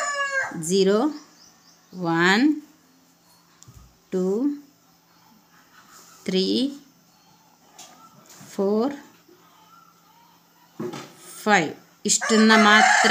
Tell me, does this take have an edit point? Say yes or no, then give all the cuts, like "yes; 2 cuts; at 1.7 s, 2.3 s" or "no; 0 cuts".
no; 0 cuts